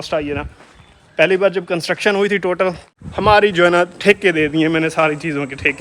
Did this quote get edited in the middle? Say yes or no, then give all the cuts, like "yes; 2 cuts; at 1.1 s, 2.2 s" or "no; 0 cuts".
yes; 1 cut; at 2.9 s